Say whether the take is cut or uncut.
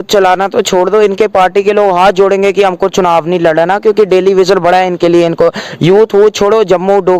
uncut